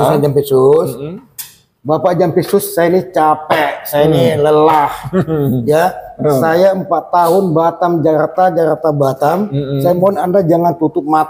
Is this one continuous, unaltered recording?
yes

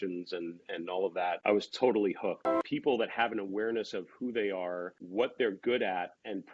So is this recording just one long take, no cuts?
no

